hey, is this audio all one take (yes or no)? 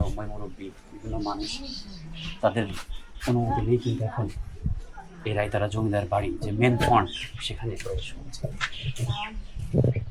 yes